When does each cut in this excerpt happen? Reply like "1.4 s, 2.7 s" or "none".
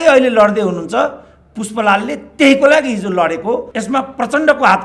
3.7 s